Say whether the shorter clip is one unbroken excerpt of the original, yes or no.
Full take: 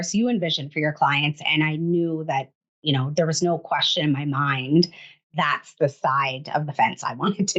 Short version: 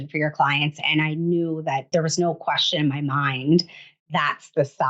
no